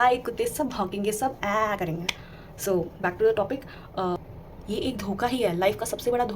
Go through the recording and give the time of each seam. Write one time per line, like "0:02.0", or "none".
0:04.2

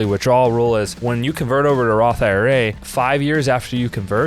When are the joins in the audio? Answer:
0:01.0
0:02.8

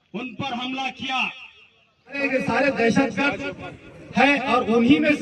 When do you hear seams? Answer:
0:02.2

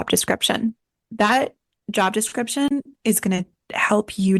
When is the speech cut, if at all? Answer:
0:00.9

